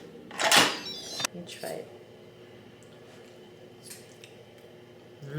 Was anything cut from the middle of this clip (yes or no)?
yes